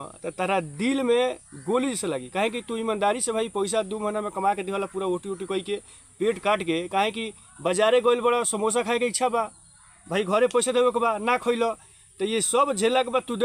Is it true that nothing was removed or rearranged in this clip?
yes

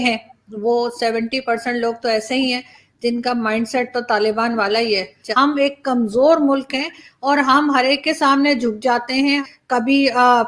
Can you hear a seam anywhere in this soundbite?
yes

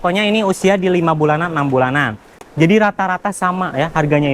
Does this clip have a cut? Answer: yes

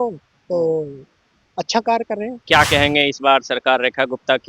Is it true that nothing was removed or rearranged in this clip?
no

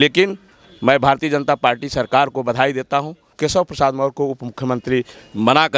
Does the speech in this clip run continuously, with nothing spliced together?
no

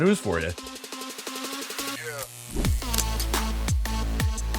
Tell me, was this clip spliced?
yes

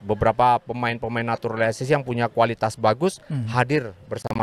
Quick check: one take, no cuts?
yes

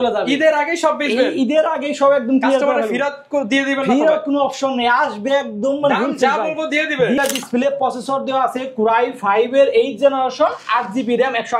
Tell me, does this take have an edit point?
yes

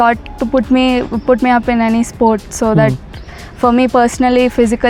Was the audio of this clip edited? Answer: no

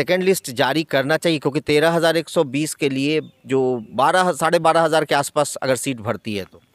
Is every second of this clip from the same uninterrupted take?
yes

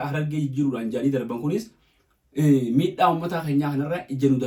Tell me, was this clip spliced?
no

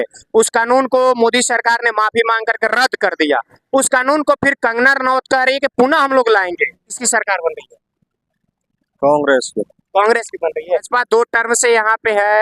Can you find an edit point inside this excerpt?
yes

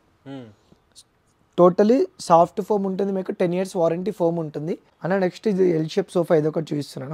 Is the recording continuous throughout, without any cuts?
no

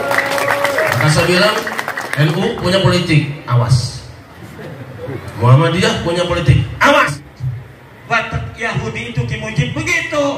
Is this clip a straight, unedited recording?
no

